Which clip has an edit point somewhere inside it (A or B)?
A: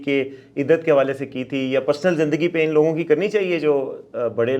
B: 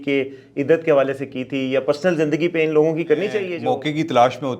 B